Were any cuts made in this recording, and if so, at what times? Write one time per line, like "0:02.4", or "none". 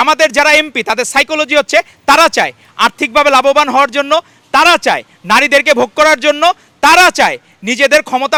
none